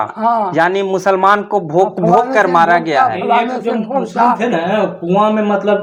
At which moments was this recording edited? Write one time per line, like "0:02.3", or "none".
none